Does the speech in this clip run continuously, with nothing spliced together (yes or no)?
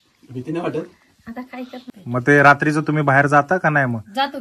no